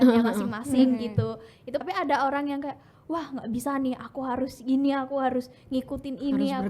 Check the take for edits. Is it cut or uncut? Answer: cut